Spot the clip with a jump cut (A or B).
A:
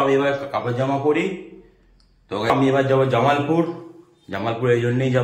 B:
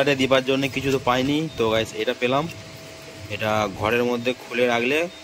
A